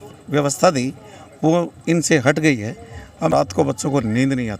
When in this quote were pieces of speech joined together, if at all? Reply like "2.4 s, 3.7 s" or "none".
3.3 s